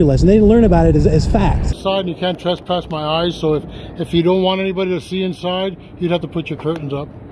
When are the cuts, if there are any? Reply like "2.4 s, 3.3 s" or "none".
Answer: 1.7 s